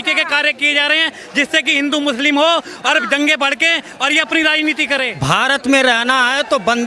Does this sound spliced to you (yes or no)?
yes